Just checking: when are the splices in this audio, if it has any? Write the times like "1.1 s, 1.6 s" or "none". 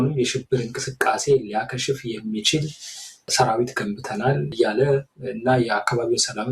3.3 s, 4.5 s